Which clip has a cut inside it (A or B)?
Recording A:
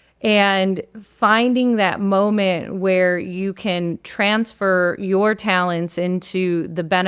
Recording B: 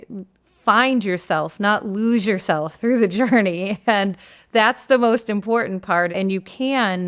B